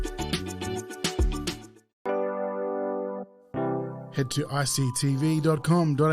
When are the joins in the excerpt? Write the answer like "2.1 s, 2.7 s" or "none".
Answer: 1.6 s